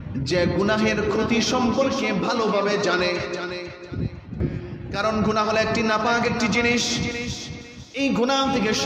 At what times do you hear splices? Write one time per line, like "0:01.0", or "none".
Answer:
0:04.4